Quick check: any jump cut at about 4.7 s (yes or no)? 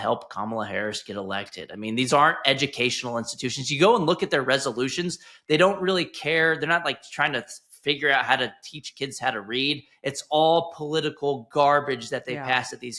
no